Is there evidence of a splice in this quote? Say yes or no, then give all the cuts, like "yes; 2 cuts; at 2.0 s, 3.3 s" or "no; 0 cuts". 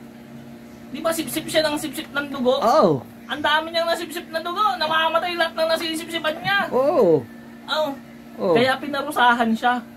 no; 0 cuts